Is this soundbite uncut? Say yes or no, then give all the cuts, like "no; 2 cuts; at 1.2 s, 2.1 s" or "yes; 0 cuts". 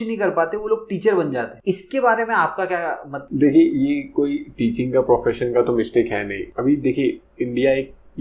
yes; 0 cuts